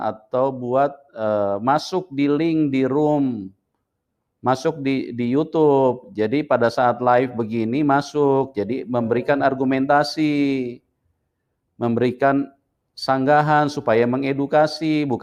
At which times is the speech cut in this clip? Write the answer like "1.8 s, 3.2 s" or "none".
none